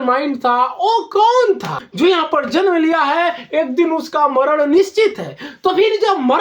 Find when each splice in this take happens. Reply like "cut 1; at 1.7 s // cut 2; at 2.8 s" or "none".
cut 1; at 1.8 s